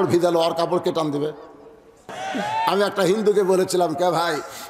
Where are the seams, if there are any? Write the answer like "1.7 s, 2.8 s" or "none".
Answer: 2.1 s